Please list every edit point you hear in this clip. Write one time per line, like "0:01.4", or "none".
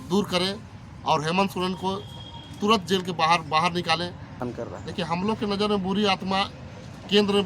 0:04.4